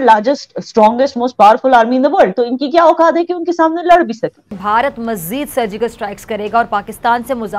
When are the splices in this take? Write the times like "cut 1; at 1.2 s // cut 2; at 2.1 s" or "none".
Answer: cut 1; at 4.6 s